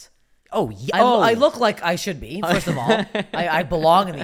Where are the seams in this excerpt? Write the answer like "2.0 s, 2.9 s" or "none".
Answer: none